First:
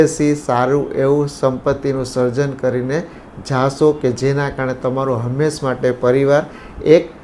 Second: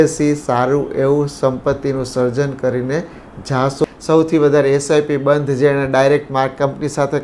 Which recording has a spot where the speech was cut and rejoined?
second; 1 cut; at 3.8 s

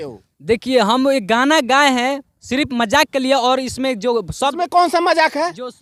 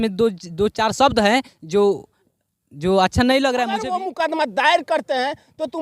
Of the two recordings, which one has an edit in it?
second; 1 cut; at 4.0 s

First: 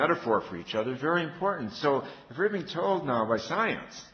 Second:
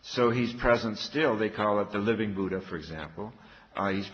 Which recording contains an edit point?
second; 1 cut; at 1.6 s

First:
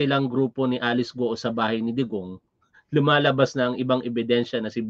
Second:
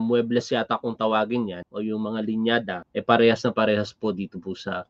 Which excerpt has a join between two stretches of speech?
second; 2 cuts; at 1.6 s, 2.8 s

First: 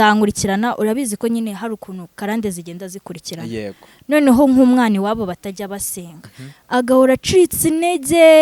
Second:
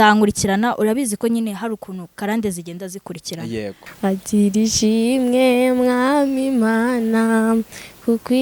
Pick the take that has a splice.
second; 1 cut; at 3.8 s

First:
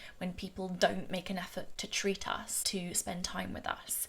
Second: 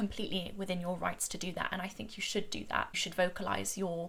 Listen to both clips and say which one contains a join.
first; 2 cuts; at 1.7 s, 2.6 s

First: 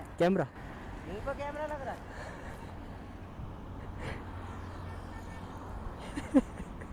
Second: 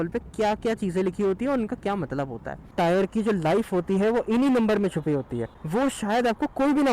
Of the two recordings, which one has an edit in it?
second; 2 cuts; at 2.7 s, 5.4 s

